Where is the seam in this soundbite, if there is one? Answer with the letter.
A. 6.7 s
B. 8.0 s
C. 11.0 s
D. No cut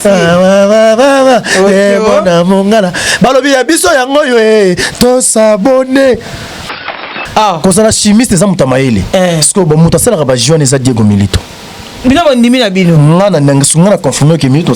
A